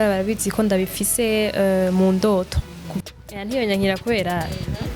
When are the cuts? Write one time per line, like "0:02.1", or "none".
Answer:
0:03.0